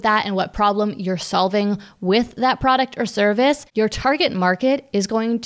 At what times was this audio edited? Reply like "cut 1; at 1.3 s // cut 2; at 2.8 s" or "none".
cut 1; at 3.6 s